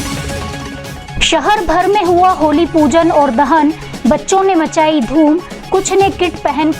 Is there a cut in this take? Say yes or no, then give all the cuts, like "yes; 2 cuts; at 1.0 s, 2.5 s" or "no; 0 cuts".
yes; 1 cut; at 1.0 s